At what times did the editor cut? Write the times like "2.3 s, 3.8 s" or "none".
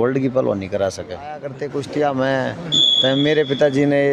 1.6 s